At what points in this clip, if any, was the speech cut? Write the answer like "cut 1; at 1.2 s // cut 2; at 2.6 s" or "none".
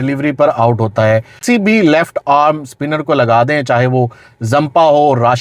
none